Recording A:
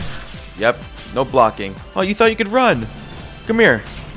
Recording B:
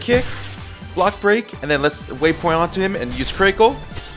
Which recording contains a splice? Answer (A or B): A